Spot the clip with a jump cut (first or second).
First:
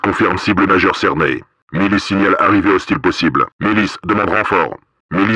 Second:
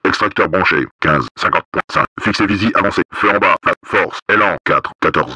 second